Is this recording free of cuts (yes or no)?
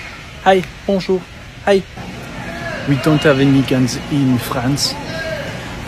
yes